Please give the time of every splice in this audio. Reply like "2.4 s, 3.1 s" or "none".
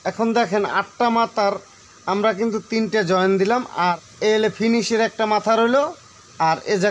4.1 s